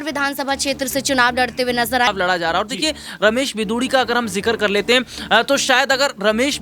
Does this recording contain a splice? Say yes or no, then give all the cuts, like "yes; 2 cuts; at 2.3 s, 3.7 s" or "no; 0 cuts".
yes; 1 cut; at 2.1 s